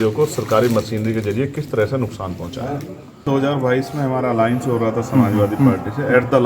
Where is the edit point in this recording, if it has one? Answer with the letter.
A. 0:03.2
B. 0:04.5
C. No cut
A